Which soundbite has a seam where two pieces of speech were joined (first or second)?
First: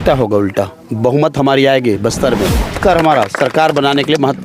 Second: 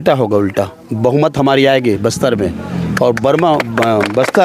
first